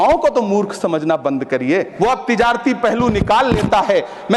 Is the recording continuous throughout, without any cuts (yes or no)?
no